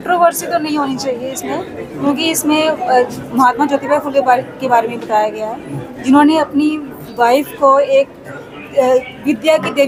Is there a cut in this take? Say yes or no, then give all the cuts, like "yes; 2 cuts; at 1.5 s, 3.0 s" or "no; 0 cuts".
no; 0 cuts